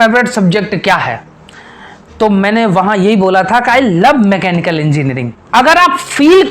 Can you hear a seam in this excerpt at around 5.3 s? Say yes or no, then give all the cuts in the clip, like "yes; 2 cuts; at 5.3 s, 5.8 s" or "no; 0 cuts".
yes; 1 cut; at 5.3 s